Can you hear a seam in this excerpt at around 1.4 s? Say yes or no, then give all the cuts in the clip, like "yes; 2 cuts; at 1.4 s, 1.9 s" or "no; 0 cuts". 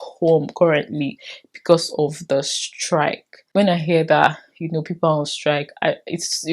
no; 1 cut; at 3.4 s